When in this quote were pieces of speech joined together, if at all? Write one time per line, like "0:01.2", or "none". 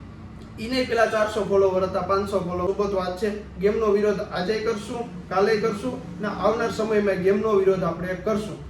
0:02.7